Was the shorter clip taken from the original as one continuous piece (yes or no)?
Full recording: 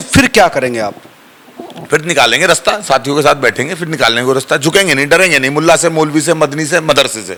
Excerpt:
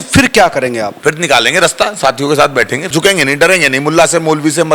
no